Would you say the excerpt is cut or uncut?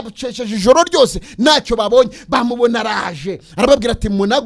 uncut